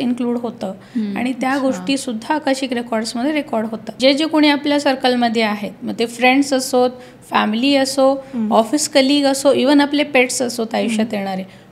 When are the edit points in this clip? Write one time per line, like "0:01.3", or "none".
0:03.9